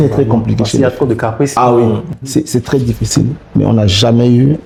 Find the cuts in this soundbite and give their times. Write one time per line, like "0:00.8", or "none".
none